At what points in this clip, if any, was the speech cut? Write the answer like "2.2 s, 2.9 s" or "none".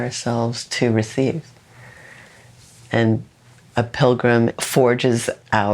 4.5 s